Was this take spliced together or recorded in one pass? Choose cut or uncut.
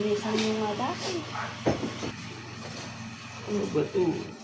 cut